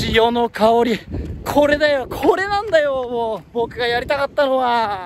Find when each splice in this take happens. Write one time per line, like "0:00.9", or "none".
none